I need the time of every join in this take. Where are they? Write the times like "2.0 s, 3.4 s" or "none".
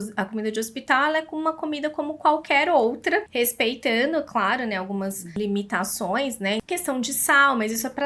3.3 s, 5.4 s, 6.6 s